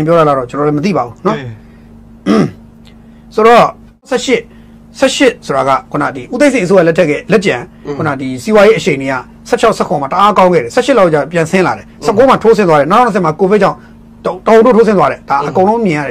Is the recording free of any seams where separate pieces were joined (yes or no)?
no